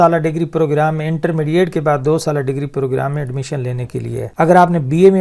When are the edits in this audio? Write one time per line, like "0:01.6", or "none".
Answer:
0:04.3